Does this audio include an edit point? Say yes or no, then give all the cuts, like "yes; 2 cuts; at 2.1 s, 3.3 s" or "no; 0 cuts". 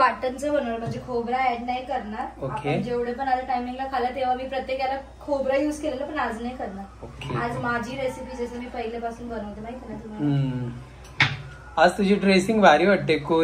no; 0 cuts